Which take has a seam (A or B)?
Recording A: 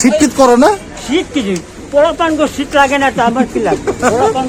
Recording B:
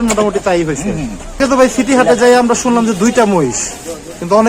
B